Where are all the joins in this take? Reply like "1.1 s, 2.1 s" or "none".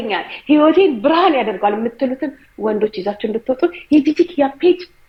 none